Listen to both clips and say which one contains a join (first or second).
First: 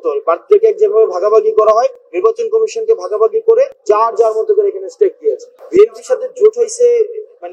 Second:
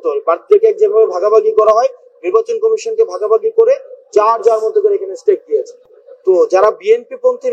first